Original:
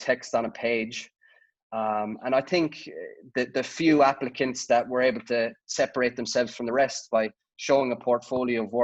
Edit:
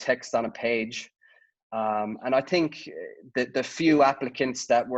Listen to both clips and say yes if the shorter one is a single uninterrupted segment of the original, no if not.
yes